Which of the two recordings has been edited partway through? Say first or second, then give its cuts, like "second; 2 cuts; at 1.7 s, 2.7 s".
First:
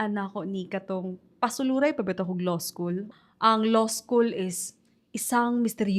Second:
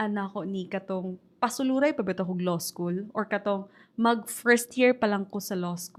first; 1 cut; at 3.1 s